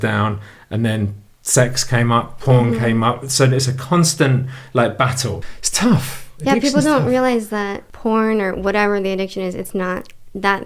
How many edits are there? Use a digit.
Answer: 2